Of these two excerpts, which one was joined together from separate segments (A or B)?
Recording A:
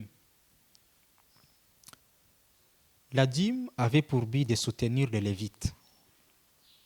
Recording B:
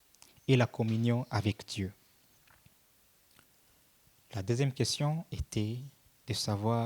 B